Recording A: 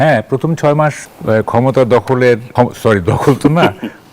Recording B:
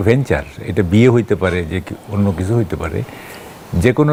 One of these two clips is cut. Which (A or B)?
A